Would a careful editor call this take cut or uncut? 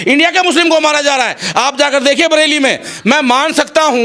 uncut